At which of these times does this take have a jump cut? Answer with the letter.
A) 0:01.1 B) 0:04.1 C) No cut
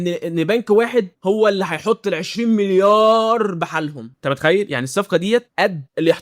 B